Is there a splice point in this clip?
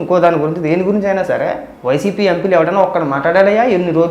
yes; 1 cut; at 1.7 s

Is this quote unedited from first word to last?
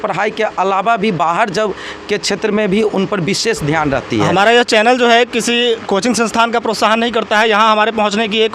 no; 1 cut; at 4.3 s

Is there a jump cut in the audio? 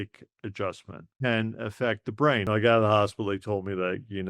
yes; 2 cuts; at 1.1 s, 2.5 s

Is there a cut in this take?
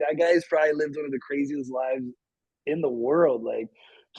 no; 0 cuts

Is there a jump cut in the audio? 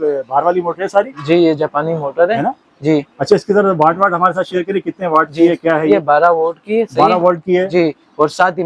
no; 0 cuts

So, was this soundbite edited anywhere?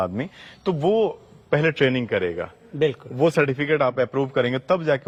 no; 0 cuts

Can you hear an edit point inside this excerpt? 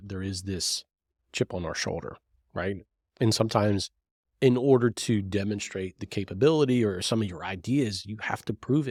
no; 0 cuts

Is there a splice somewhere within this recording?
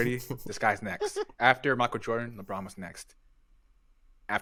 no; 0 cuts

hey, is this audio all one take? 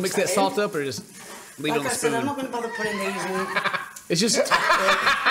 yes; 0 cuts

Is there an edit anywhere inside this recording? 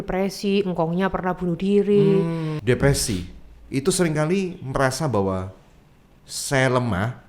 yes; 1 cut; at 2.5 s

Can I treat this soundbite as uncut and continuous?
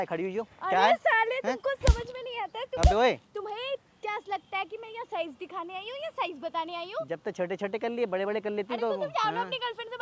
yes; 0 cuts

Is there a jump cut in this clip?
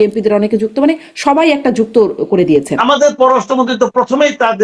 yes; 1 cut; at 2.8 s

